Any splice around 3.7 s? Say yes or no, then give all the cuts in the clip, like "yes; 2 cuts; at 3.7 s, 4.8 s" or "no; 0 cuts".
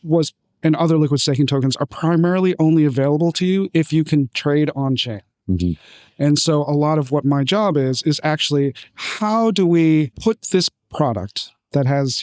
no; 1 cut; at 10.1 s